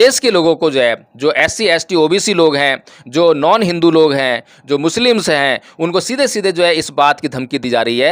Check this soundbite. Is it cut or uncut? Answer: uncut